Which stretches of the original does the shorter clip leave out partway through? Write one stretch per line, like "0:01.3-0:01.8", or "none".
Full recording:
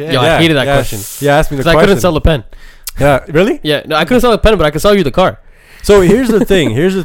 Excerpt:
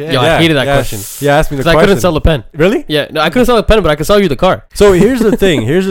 0:02.5-0:03.3
0:05.4-0:05.7